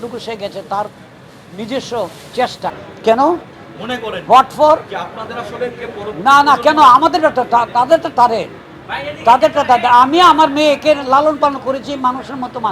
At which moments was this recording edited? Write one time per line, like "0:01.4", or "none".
0:02.7